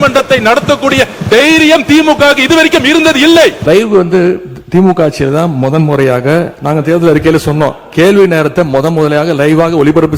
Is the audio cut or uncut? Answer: cut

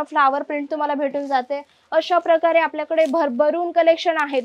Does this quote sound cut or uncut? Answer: uncut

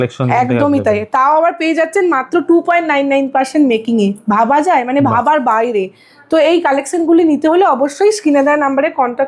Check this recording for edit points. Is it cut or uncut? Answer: uncut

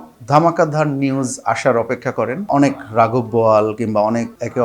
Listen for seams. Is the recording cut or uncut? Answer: cut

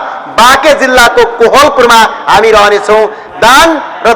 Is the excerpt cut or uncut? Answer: uncut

